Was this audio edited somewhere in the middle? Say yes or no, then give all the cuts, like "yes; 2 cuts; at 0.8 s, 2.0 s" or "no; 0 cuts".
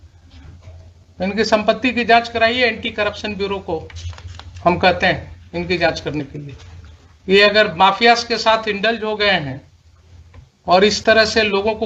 no; 0 cuts